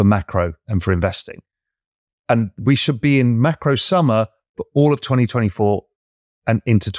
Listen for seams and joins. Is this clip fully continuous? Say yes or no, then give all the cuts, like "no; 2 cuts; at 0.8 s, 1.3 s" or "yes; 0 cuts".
yes; 0 cuts